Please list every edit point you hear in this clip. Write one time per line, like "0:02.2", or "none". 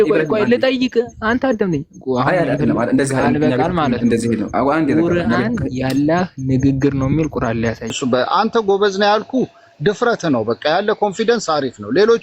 0:07.9